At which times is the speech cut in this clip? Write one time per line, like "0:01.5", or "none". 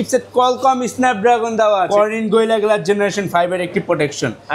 0:01.9

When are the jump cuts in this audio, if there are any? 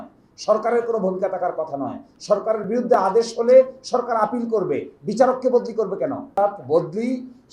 0:06.3

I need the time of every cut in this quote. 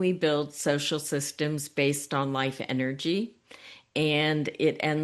none

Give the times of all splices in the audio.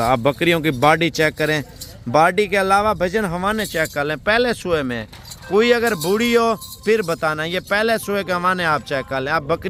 none

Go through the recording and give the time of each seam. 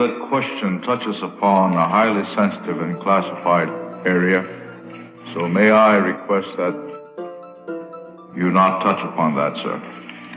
0:06.8

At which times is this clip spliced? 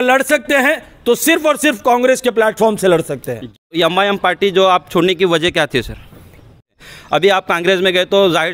0:03.7
0:06.7

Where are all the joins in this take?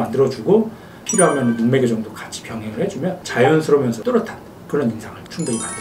none

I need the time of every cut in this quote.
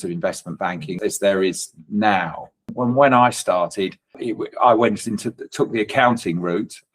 0:00.9
0:02.6
0:04.2

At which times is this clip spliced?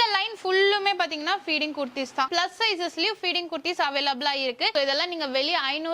0:02.3
0:04.7

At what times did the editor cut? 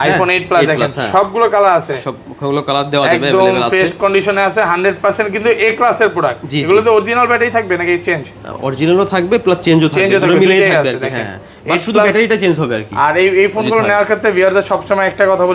none

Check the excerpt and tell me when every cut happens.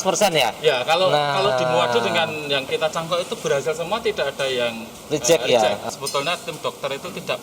0:05.8

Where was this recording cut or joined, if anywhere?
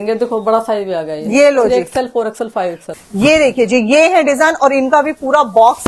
0:02.8

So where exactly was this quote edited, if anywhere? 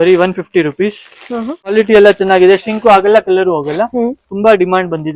0:01.7

